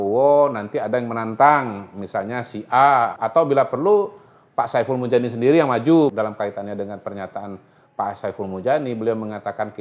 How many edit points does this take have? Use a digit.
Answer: 2